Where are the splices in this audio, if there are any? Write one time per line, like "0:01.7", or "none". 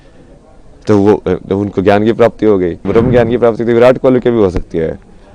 0:02.8